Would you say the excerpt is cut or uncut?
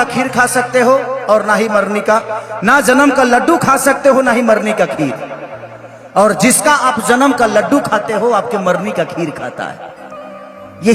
uncut